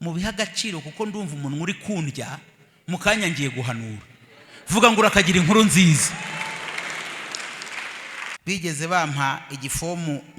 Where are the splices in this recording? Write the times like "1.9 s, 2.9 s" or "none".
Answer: 8.3 s

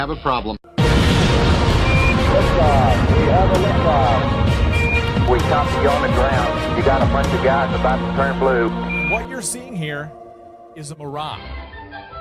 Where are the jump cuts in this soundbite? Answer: 9.7 s

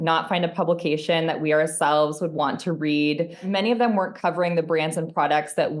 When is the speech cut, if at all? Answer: 3.4 s

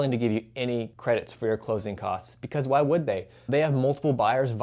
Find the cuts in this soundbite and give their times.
0.9 s

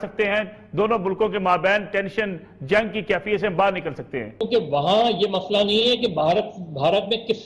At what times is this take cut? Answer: 4.4 s

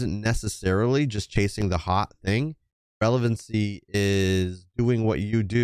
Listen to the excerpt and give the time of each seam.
none

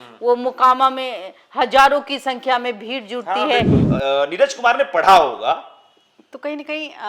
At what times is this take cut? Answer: 3.9 s

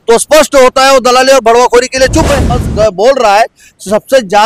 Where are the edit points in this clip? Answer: 2.6 s

